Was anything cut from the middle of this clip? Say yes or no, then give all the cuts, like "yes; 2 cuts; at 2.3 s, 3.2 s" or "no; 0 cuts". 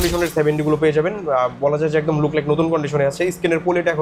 no; 0 cuts